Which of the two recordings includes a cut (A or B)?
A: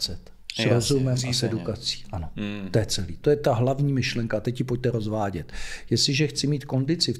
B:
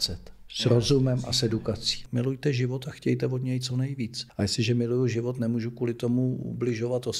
B